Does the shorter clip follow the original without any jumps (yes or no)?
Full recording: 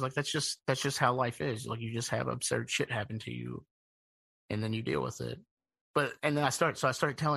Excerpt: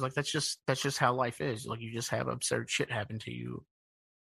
yes